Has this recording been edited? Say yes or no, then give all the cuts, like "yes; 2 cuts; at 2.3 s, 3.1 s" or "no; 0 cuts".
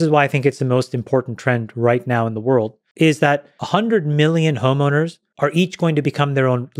yes; 3 cuts; at 2.8 s, 3.5 s, 5.2 s